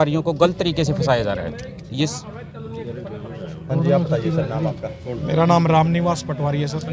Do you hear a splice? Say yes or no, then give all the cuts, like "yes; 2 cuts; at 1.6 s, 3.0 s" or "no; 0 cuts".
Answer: no; 0 cuts